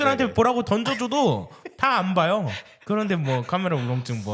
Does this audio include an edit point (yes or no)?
no